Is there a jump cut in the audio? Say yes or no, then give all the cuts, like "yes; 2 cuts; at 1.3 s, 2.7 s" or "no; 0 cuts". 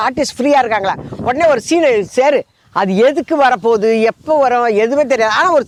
no; 0 cuts